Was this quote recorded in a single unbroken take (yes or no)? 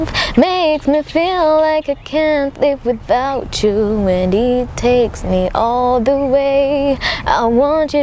yes